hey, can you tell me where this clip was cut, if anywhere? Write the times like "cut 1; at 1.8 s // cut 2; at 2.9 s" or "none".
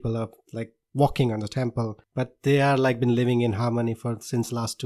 cut 1; at 2.0 s

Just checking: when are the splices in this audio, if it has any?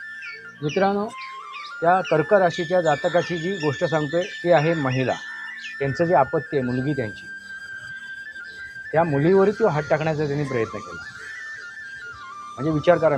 cut 1; at 5.6 s

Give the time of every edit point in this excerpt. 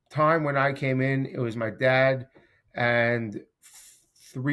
none

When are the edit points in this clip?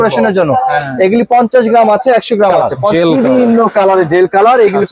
cut 1; at 2.8 s

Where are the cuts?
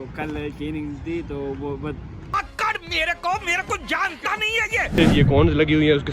cut 1; at 4.9 s

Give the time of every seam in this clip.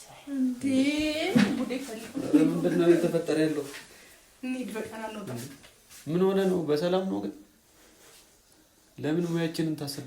none

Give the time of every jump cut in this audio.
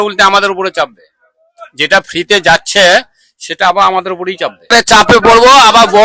none

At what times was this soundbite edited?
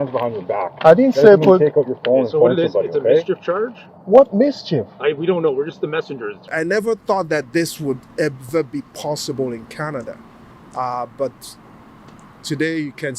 cut 1; at 6.5 s

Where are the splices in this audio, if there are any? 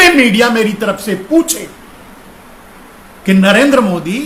none

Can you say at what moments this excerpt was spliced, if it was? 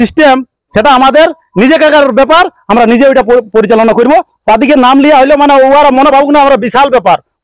cut 1; at 4.3 s

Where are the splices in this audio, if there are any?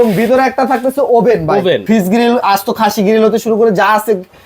cut 1; at 1.8 s

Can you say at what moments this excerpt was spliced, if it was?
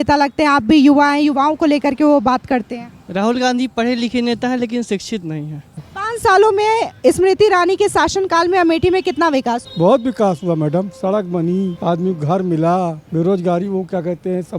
cut 1; at 5.9 s // cut 2; at 9.7 s // cut 3; at 11.8 s // cut 4; at 13.0 s

